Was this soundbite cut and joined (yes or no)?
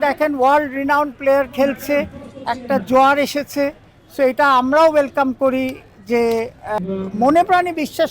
yes